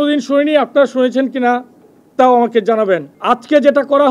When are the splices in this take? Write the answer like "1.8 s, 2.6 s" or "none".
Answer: 3.1 s